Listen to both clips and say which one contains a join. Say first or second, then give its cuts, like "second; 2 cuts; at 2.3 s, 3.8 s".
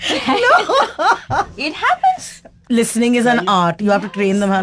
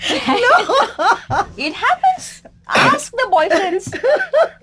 first; 1 cut; at 2.5 s